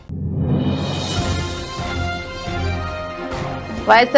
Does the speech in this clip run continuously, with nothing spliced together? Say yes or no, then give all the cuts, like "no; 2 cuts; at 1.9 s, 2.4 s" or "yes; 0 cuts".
yes; 0 cuts